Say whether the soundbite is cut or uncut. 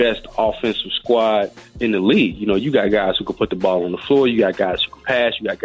uncut